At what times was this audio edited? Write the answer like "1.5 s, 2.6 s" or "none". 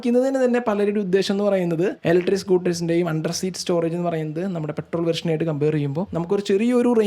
2.0 s, 6.1 s